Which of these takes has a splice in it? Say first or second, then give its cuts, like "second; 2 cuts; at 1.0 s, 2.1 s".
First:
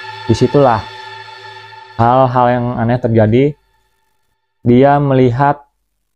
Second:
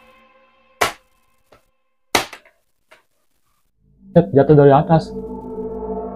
second; 1 cut; at 5.1 s